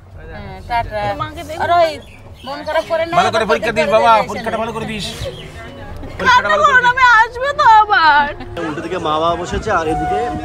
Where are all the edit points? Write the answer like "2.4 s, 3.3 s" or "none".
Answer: 8.6 s